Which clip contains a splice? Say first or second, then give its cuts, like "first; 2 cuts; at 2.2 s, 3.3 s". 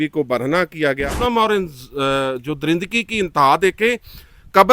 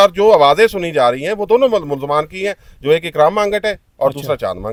first; 1 cut; at 1.2 s